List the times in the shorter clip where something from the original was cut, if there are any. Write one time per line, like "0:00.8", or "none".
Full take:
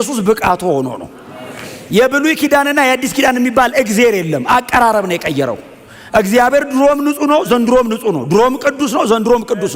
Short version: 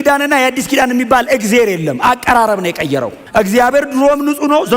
0:03.2